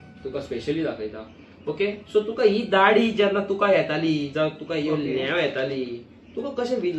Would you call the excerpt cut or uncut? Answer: uncut